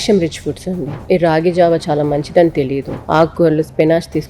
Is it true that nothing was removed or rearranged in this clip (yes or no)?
no